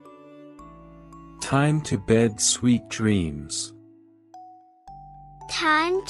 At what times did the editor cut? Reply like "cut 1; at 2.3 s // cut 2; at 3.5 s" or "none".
cut 1; at 1.0 s